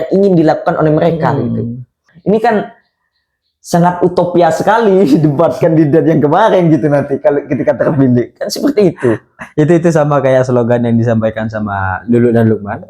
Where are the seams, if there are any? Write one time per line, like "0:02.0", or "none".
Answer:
0:02.1